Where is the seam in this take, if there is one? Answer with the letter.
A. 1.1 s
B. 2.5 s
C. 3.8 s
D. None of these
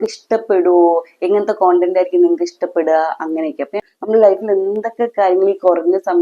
C